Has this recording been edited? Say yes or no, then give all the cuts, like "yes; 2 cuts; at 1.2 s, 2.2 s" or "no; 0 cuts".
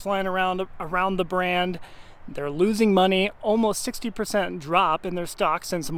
no; 0 cuts